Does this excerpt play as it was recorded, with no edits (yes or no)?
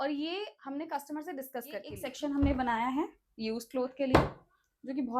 no